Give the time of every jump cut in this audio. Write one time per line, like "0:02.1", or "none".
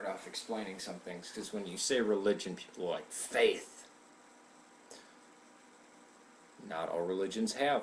0:05.6